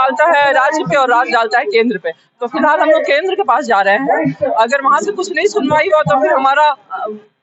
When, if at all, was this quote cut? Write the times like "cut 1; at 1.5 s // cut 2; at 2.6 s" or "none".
none